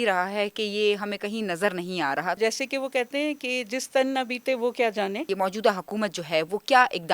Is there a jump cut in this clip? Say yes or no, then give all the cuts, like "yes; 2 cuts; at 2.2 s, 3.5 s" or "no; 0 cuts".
yes; 2 cuts; at 2.4 s, 5.3 s